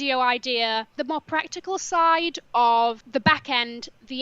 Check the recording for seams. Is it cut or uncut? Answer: cut